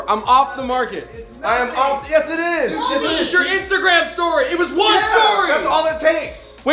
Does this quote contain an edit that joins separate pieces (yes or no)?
no